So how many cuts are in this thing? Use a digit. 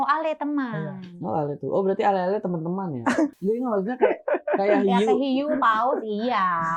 1